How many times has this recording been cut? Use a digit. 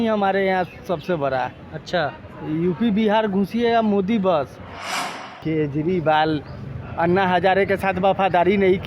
1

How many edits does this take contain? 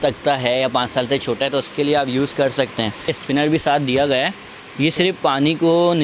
1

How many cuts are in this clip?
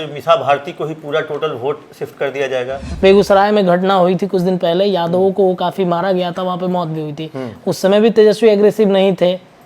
1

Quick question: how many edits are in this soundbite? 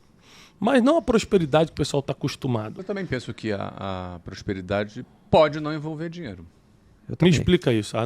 1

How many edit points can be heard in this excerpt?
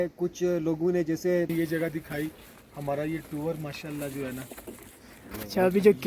1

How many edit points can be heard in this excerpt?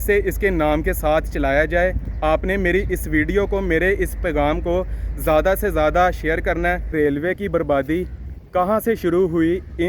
1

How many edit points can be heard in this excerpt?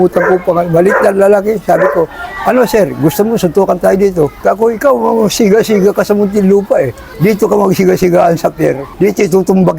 3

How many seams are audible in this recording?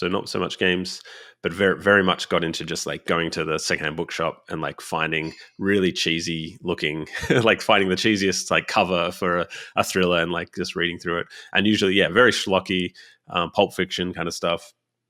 0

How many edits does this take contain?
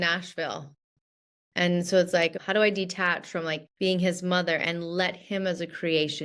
2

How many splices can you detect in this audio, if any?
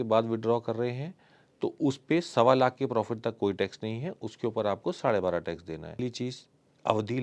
1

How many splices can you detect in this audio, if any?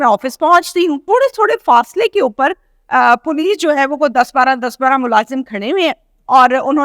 1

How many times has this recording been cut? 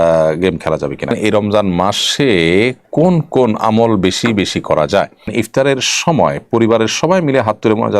2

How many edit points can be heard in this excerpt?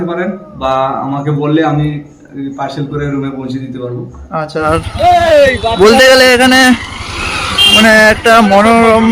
1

